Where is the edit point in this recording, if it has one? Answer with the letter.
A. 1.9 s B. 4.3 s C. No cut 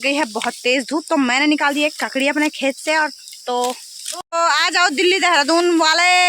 B